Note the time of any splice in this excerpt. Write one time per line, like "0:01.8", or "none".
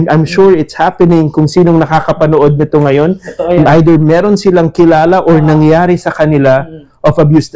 none